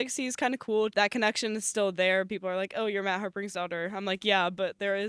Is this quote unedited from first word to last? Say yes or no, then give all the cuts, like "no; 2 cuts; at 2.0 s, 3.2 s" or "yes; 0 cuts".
no; 1 cut; at 0.9 s